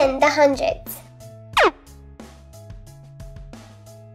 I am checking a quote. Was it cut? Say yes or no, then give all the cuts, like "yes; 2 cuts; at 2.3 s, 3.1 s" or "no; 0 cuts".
yes; 1 cut; at 2.1 s